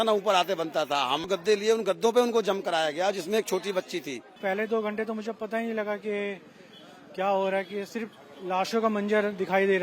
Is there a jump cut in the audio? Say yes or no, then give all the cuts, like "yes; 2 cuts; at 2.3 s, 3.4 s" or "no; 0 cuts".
yes; 2 cuts; at 1.3 s, 4.4 s